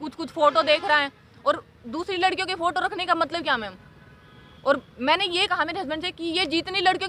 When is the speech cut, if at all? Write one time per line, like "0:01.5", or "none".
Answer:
none